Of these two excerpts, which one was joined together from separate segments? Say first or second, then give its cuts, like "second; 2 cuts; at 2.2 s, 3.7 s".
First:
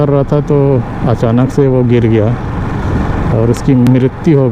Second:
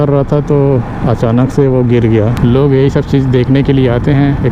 second; 1 cut; at 2.3 s